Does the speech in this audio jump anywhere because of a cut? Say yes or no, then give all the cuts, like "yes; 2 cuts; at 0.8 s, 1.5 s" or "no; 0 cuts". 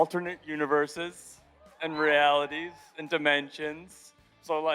no; 0 cuts